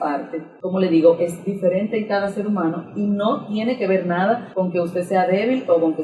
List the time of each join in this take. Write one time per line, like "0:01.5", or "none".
0:04.5